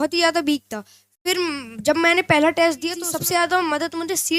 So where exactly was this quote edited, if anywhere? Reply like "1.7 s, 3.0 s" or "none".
3.1 s